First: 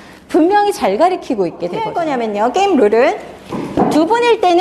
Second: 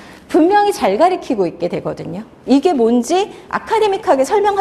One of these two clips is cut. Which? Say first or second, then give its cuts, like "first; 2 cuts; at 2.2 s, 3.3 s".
first; 1 cut; at 1.9 s